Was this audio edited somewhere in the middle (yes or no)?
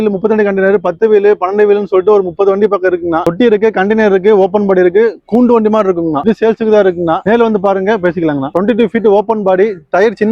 yes